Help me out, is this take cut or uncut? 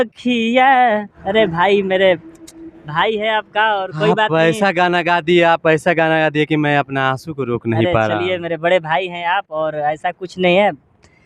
cut